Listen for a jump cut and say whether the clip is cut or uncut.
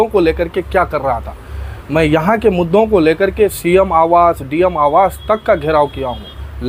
uncut